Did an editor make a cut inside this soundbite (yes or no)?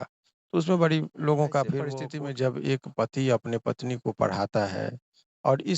yes